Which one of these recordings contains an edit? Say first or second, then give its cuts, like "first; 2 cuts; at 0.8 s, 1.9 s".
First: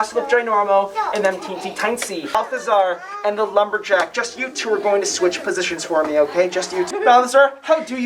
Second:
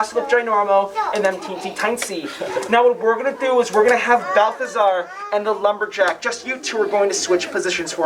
first; 2 cuts; at 2.4 s, 6.9 s